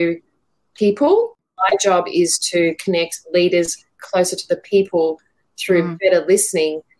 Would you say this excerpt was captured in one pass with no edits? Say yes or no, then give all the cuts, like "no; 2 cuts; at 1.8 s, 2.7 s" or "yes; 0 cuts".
no; 2 cuts; at 1.4 s, 5.9 s